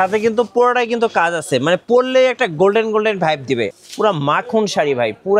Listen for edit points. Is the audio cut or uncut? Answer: cut